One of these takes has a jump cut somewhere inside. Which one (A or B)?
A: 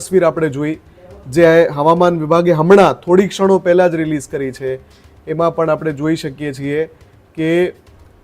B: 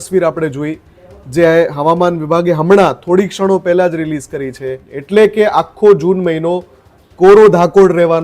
B